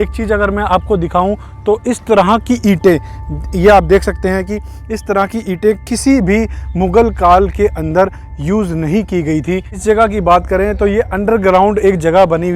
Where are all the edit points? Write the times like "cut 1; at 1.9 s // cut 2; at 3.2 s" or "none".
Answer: cut 1; at 9.7 s